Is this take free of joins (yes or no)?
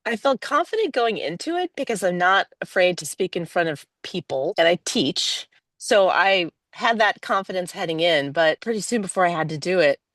no